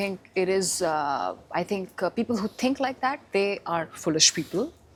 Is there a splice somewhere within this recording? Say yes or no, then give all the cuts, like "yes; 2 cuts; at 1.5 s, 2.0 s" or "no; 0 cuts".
no; 0 cuts